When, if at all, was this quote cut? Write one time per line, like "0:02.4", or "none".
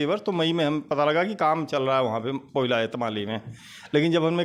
none